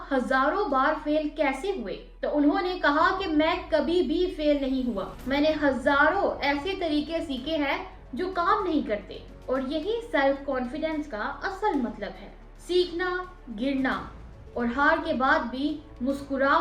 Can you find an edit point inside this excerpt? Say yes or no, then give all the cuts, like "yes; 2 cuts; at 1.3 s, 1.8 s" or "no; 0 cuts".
no; 0 cuts